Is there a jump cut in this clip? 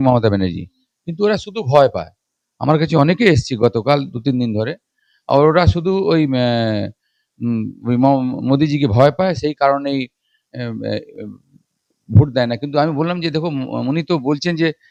no; 0 cuts

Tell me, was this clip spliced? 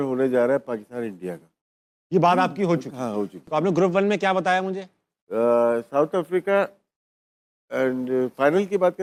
no; 0 cuts

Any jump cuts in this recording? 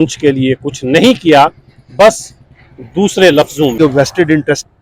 yes; 1 cut; at 3.7 s

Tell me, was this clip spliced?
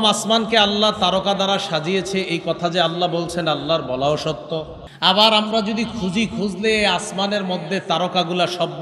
yes; 1 cut; at 4.8 s

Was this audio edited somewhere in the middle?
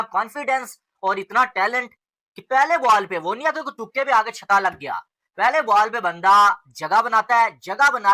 no; 0 cuts

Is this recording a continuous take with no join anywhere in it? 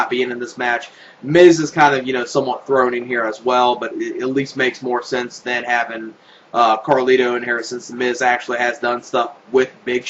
no; 1 cut; at 5.6 s

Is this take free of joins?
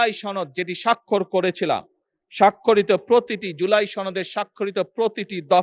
yes; 0 cuts

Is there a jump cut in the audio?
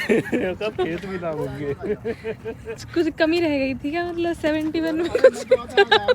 yes; 1 cut; at 2.8 s

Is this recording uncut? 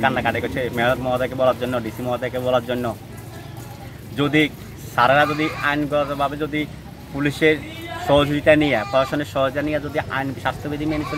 yes; 0 cuts

